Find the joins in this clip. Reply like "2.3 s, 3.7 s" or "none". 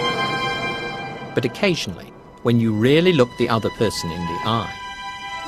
none